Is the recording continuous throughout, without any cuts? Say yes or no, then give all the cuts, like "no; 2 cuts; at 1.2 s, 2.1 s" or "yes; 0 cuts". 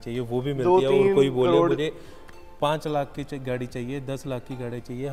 yes; 0 cuts